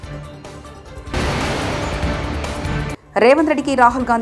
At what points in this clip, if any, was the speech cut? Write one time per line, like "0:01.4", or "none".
none